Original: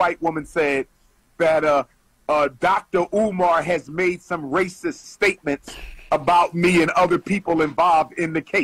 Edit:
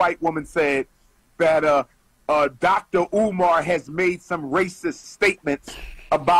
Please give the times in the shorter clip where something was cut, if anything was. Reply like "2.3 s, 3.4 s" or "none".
none